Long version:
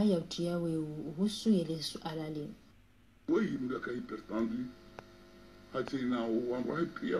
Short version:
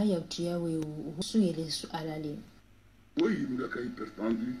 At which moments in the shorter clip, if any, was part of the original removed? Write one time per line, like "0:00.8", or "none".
0:01.2